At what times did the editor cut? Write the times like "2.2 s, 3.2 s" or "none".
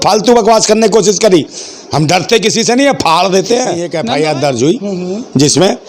3.9 s